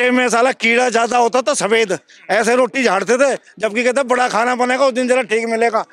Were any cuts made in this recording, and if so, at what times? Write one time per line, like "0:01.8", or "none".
none